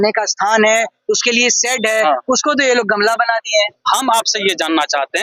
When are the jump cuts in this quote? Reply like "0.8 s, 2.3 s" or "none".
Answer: 3.8 s